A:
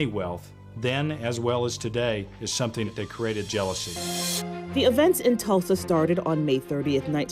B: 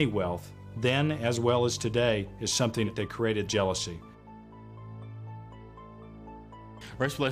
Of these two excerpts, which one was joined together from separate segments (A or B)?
A